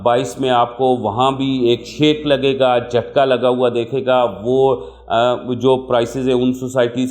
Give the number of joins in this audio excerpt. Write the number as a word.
zero